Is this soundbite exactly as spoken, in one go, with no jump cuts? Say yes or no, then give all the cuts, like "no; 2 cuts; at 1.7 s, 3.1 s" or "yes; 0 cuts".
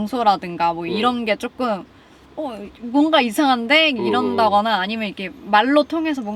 yes; 0 cuts